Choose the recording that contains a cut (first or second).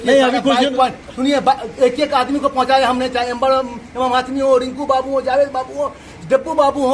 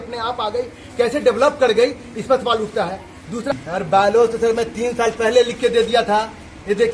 second